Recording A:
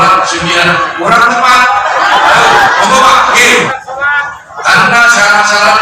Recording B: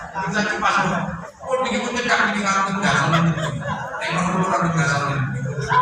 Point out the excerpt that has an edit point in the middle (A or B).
A